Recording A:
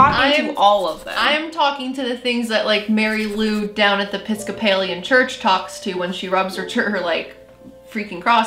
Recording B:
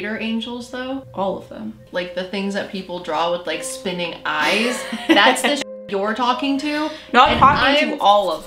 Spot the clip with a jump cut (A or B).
B